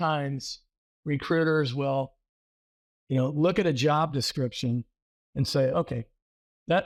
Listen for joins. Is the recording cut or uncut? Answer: uncut